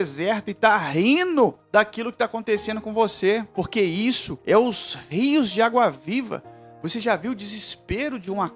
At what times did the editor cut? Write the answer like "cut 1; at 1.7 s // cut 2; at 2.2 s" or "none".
cut 1; at 6.4 s